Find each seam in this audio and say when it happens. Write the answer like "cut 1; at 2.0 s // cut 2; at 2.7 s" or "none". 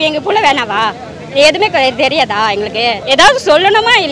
cut 1; at 3.0 s